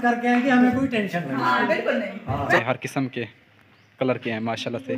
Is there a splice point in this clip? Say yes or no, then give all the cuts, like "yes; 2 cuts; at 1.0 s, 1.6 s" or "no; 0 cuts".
yes; 1 cut; at 2.6 s